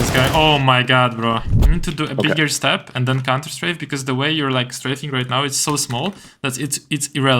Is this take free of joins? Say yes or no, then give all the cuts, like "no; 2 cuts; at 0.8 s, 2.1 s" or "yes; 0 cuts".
no; 1 cut; at 1.6 s